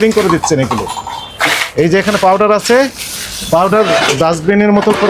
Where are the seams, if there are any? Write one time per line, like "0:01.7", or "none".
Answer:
none